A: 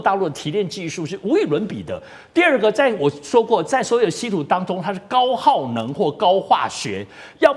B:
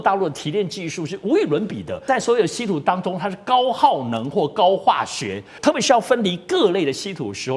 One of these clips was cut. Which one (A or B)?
B